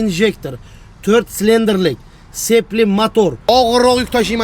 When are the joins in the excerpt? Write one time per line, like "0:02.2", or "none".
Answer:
0:03.4

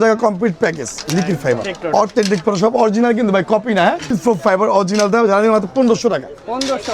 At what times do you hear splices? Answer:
0:01.7
0:04.1

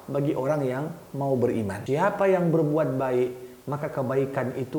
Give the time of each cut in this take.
0:01.8

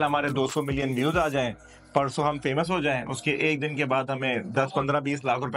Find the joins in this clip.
none

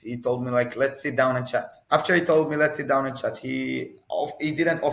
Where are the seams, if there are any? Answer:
0:01.8

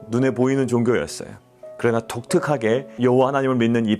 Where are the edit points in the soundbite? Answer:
0:02.9

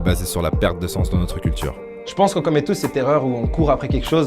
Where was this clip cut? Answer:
0:02.0

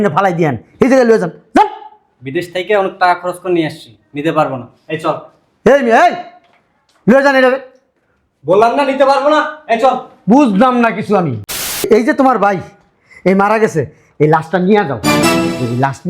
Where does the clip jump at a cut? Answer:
0:11.8

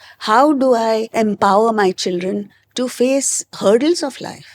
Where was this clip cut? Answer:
0:01.1
0:03.4

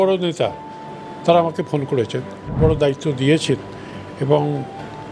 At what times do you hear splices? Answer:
0:02.5

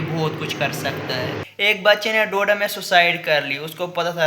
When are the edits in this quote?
0:01.4

